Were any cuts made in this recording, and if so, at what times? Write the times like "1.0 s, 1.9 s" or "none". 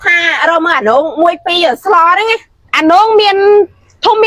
2.6 s